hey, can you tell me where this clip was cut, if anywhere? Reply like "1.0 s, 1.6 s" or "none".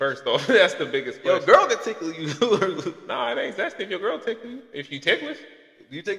none